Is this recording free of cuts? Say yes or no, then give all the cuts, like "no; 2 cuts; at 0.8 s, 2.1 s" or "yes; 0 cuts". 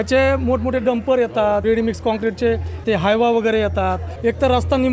no; 3 cuts; at 1.6 s, 2.8 s, 4.1 s